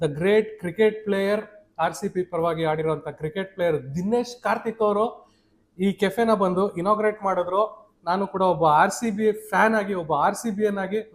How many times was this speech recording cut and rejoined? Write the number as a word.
zero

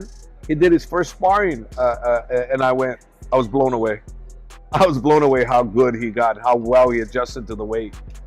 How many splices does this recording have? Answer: zero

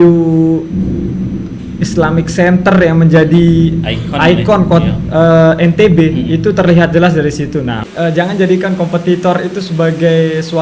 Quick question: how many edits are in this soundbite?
one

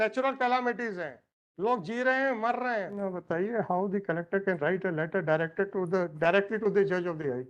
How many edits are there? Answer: one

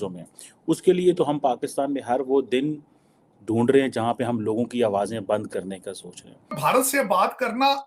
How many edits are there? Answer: one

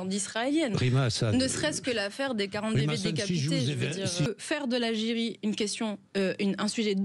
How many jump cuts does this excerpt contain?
one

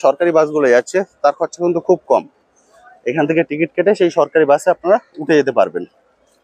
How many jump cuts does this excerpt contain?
zero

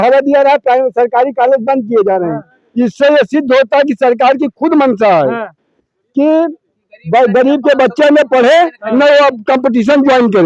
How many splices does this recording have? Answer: zero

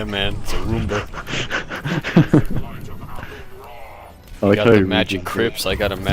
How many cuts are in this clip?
one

